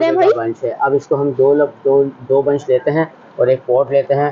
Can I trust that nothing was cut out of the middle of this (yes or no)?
yes